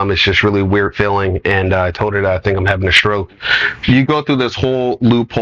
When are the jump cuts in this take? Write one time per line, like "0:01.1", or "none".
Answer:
0:03.8